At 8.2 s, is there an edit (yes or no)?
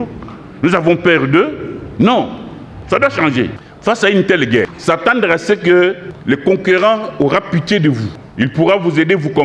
yes